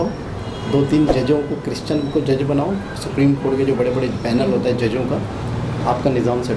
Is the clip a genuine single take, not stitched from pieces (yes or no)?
yes